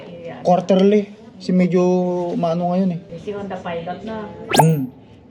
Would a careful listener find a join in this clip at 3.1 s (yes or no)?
yes